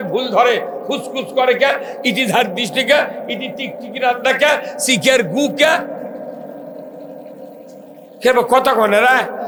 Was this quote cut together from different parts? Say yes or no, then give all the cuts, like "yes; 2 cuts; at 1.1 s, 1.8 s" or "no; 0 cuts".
no; 0 cuts